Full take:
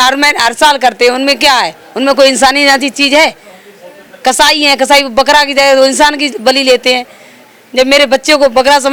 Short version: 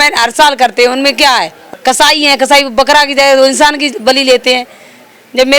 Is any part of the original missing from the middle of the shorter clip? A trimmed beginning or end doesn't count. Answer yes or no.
yes